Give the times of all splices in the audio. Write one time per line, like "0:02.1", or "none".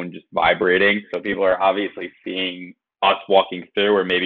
0:01.1